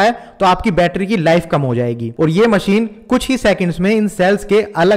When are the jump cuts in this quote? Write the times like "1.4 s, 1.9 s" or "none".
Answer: 2.0 s